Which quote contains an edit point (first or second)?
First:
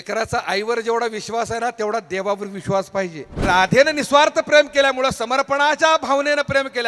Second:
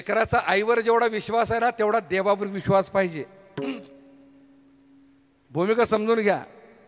first